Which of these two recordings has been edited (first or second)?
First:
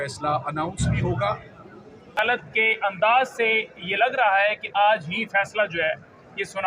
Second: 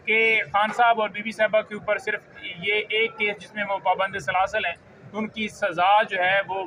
first